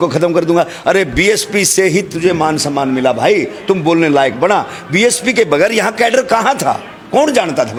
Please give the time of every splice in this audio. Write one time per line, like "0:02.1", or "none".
none